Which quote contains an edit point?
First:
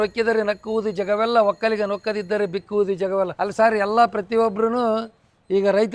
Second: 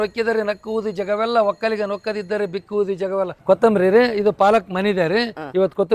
second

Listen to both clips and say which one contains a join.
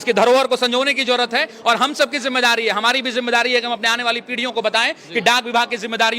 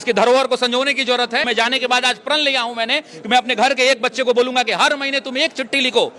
second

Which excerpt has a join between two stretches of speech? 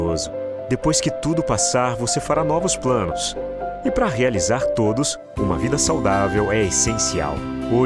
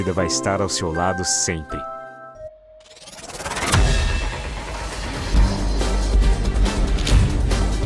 second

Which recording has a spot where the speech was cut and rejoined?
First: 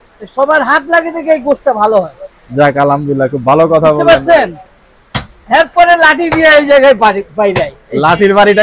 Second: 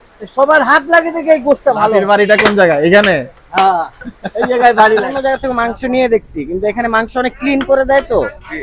second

